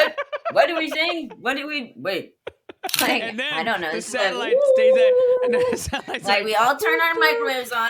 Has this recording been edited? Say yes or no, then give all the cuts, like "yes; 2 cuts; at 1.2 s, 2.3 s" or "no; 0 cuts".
yes; 1 cut; at 3.0 s